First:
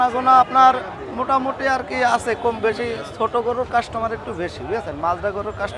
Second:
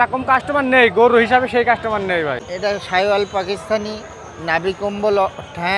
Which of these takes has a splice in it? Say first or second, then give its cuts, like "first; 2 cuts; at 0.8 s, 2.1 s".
second; 1 cut; at 2.5 s